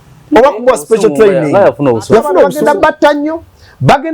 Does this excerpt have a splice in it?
yes; 1 cut; at 2.5 s

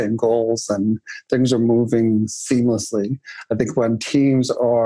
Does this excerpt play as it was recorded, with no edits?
yes; 0 cuts

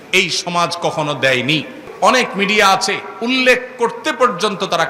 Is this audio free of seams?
no; 1 cut; at 1.8 s

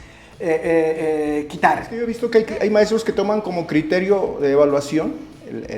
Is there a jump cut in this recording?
yes; 1 cut; at 2.0 s

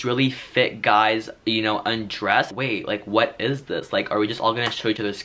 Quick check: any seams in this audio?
yes; 1 cut; at 2.5 s

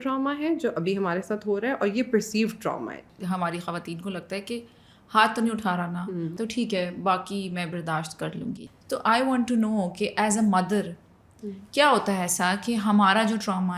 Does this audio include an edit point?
yes; 3 cuts; at 3.1 s, 6.3 s, 8.6 s

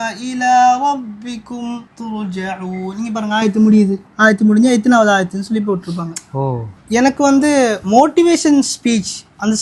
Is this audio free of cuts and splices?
no; 1 cut; at 6.7 s

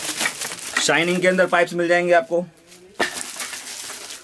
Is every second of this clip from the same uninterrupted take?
yes; 0 cuts

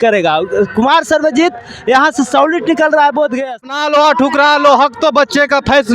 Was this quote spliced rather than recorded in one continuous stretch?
yes; 1 cut; at 3.7 s

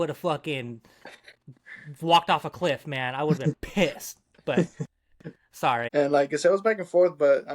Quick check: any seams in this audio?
yes; 1 cut; at 5.9 s

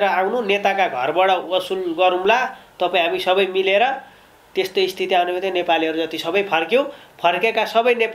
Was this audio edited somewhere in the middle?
no; 0 cuts

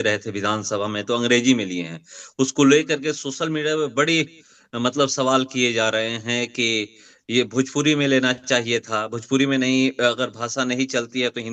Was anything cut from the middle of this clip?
no; 0 cuts

